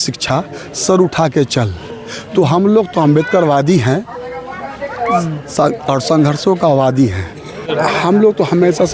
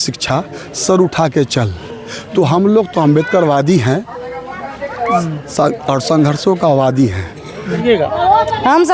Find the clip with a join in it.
second; 1 cut; at 7.7 s

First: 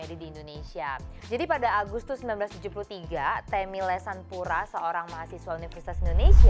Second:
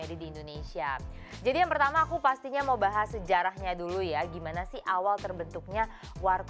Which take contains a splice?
first; 1 cut; at 1.1 s

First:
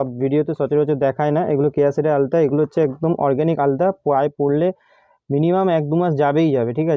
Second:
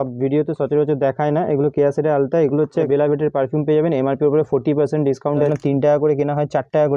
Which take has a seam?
second; 2 cuts; at 2.9 s, 5.5 s

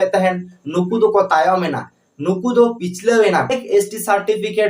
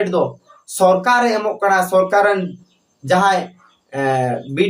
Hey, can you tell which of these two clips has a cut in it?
first; 1 cut; at 3.7 s

